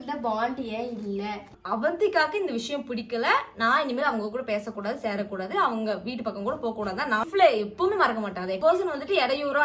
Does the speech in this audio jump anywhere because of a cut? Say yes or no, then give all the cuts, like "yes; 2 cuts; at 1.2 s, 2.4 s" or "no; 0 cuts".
yes; 3 cuts; at 1.5 s, 7.2 s, 8.6 s